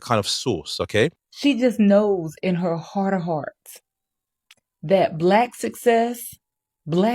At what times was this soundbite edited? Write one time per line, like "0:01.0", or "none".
0:01.3